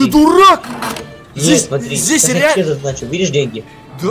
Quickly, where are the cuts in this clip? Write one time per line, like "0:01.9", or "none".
none